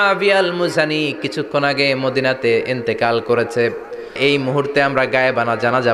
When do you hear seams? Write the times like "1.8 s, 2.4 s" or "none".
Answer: 4.2 s